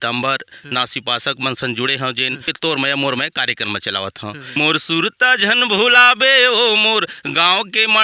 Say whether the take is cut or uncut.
cut